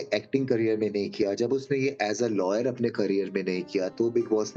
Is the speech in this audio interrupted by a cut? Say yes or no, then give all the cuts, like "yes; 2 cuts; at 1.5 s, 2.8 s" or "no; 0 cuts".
no; 0 cuts